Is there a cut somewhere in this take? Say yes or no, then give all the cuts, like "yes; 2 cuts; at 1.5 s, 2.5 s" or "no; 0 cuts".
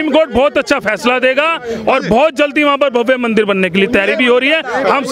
no; 0 cuts